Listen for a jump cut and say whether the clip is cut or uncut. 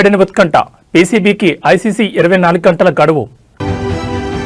uncut